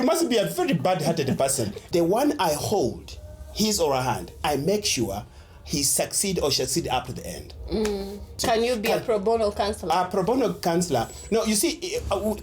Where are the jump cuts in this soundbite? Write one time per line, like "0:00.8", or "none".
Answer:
0:01.8
0:08.3